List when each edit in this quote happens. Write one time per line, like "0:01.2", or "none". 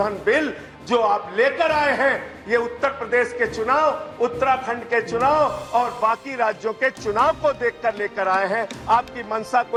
none